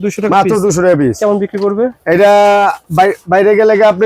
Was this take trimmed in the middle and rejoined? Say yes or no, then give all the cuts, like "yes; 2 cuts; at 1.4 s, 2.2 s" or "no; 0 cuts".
no; 0 cuts